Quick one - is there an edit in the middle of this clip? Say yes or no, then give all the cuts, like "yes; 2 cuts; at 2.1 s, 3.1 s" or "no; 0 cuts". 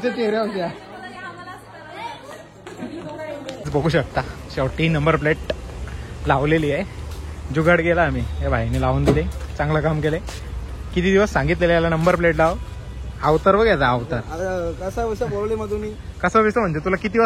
no; 0 cuts